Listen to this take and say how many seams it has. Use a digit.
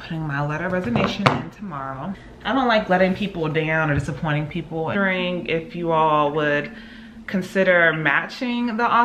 2